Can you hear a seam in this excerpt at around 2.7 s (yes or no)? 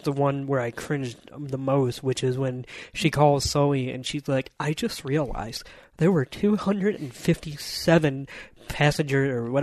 no